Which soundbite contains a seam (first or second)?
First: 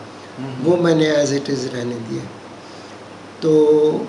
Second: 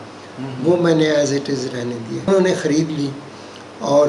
second